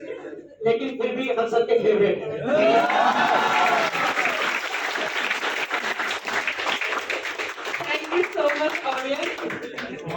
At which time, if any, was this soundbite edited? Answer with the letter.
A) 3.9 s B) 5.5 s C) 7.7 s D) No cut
D